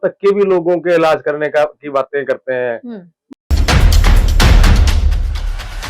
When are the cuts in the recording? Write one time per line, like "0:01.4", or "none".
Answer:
0:03.3